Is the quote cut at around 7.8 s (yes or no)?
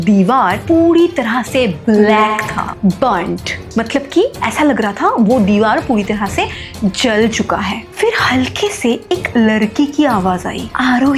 yes